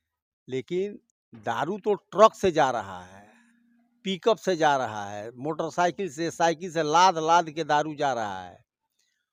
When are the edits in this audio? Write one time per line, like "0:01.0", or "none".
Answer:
none